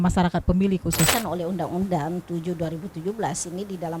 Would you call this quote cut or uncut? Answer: cut